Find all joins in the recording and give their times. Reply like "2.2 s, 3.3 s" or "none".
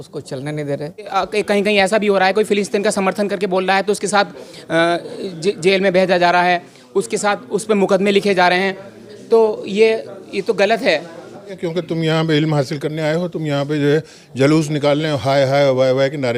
1.0 s, 11.6 s

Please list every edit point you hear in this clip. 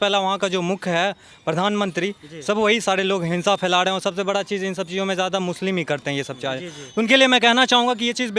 none

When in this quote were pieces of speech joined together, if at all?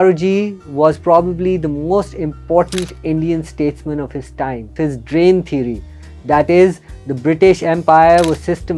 4.7 s

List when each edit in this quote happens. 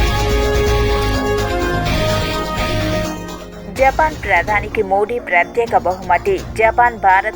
1.3 s

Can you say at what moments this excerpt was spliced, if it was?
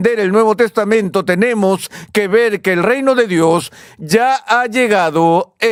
none

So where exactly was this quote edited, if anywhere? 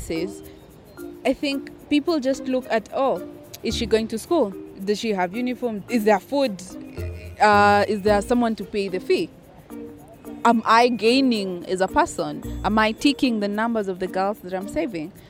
4.7 s

